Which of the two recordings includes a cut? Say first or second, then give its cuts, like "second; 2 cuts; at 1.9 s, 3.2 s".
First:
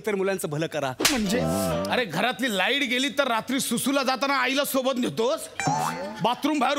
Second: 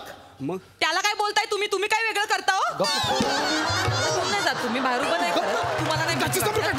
first; 1 cut; at 1.9 s